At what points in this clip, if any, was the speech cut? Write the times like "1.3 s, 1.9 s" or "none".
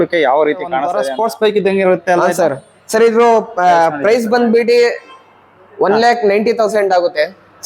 0.9 s